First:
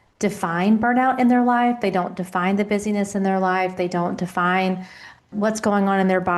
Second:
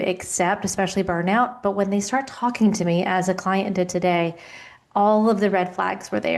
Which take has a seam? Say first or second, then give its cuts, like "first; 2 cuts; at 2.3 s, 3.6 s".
first; 1 cut; at 5.3 s